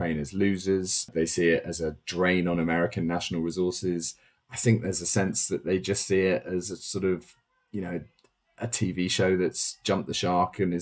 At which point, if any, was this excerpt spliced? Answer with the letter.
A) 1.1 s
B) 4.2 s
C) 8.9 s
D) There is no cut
A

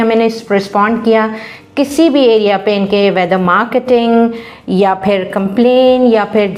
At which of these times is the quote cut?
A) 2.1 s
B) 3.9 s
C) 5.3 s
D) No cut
D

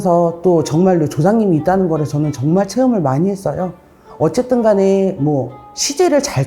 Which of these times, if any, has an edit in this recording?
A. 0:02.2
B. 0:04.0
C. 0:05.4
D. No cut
B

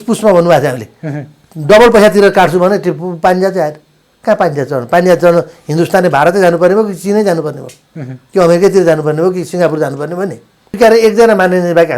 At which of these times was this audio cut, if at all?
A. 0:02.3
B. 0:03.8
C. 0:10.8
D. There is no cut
C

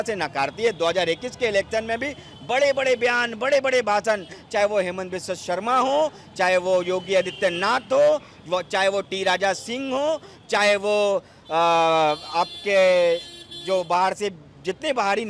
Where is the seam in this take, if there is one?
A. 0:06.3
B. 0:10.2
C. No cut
C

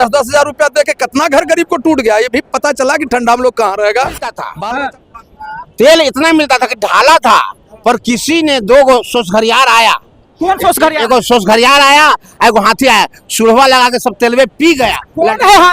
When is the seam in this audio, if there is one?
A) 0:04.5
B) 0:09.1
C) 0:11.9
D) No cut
A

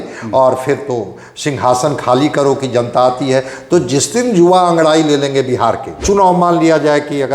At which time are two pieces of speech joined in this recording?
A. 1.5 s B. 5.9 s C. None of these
B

